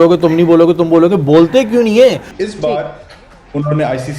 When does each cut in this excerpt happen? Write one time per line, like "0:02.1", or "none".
0:02.3